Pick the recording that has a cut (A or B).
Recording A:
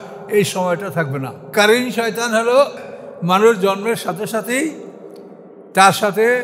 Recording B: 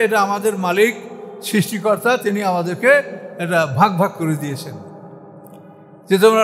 A